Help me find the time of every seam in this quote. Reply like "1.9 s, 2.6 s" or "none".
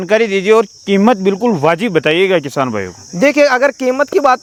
none